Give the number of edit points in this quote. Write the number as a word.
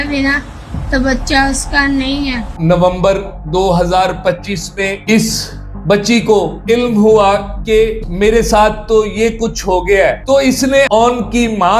two